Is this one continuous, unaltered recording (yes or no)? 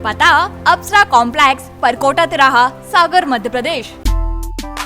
no